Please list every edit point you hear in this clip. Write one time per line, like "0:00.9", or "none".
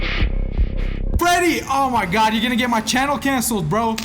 0:01.2